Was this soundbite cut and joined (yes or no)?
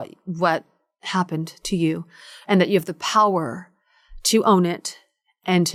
no